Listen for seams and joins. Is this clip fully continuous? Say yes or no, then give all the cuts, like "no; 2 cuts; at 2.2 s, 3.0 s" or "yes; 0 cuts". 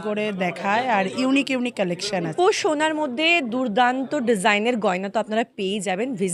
no; 1 cut; at 2.3 s